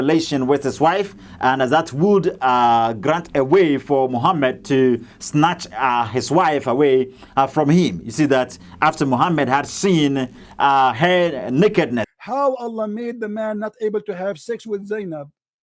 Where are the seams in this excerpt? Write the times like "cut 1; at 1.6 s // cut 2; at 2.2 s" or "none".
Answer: cut 1; at 12.1 s